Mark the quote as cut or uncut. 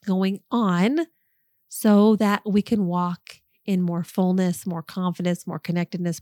uncut